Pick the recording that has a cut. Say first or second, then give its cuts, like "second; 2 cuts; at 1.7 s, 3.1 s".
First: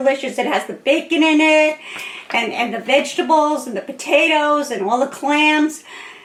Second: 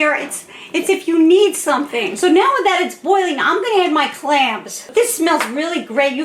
second; 2 cuts; at 2.1 s, 4.7 s